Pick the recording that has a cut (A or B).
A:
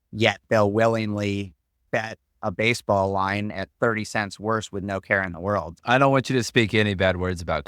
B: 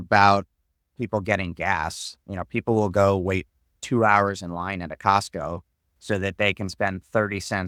A